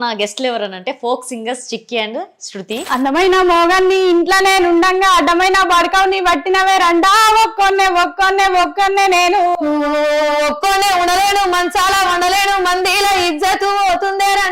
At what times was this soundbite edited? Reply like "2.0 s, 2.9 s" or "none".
2.8 s